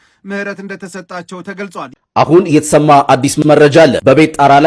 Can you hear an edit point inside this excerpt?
yes; 1 cut; at 1.9 s

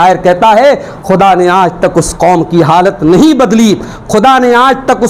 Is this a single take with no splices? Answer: yes; 0 cuts

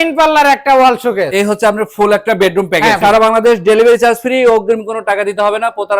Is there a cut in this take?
yes; 2 cuts; at 1.3 s, 3.0 s

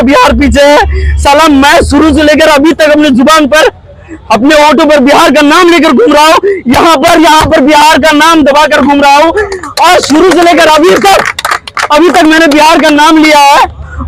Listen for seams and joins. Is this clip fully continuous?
yes; 0 cuts

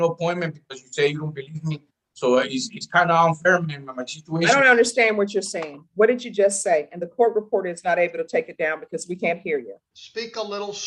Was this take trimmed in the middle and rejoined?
no; 0 cuts

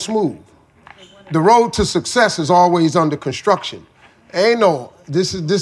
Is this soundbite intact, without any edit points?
yes; 0 cuts

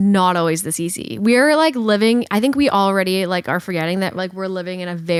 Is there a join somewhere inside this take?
no; 0 cuts

